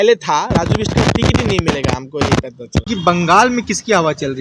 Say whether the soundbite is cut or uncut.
cut